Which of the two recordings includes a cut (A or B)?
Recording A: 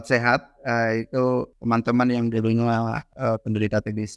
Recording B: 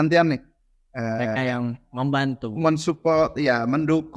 A